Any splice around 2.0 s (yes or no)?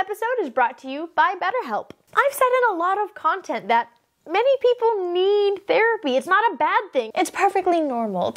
yes